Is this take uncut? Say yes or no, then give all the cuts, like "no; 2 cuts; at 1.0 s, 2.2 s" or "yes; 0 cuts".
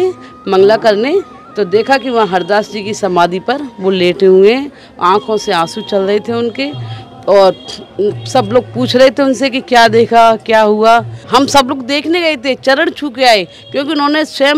no; 1 cut; at 11.2 s